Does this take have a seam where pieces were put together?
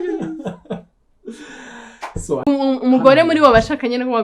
yes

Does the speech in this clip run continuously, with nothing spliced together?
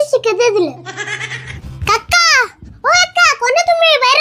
no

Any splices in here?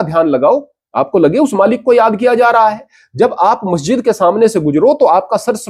no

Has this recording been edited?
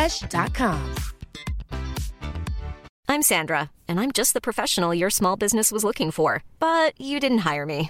yes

